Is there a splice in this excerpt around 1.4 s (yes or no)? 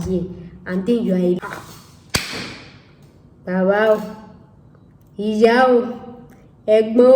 yes